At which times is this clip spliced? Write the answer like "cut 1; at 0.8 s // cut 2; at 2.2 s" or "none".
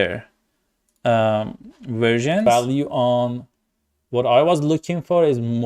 cut 1; at 2.9 s